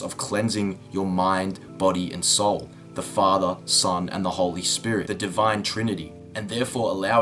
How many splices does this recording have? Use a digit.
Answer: 1